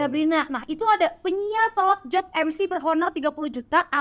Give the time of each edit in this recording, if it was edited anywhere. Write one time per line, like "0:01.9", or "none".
none